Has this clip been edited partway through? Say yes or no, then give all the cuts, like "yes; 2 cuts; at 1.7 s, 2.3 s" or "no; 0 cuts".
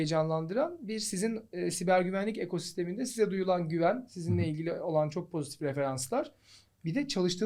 no; 0 cuts